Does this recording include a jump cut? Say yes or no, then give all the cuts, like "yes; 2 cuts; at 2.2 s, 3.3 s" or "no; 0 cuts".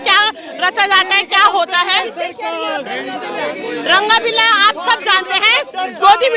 no; 0 cuts